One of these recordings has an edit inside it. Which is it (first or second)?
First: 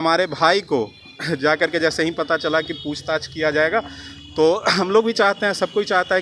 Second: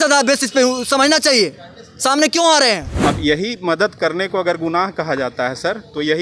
second